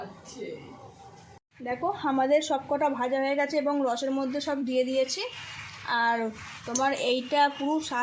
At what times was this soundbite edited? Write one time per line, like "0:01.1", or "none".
0:01.5